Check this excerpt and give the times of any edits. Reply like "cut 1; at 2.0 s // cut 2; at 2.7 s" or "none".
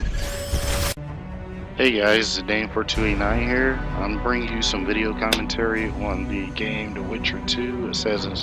none